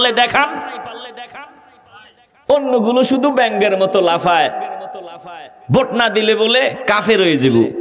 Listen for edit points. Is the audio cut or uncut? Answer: uncut